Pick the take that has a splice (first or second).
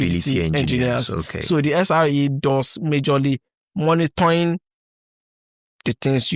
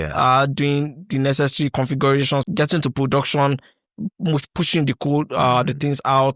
second